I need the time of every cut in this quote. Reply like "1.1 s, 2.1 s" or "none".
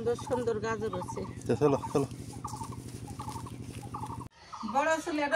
4.3 s